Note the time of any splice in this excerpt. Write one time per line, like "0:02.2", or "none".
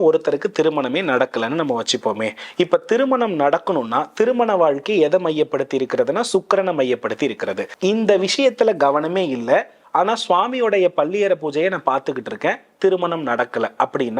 0:07.7